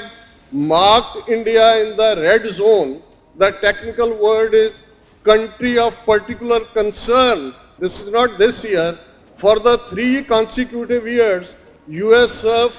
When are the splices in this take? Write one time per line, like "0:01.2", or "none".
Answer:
0:07.8